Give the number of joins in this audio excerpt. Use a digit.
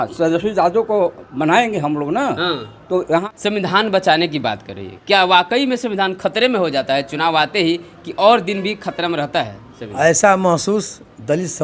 1